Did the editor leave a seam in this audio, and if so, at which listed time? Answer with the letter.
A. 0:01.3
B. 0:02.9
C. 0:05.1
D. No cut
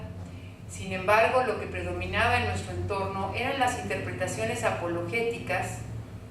B